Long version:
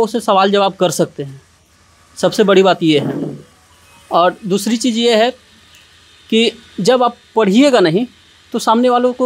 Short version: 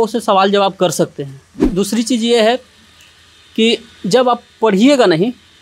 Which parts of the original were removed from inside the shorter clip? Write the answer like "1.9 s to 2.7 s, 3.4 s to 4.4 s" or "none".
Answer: 1.7 s to 4.4 s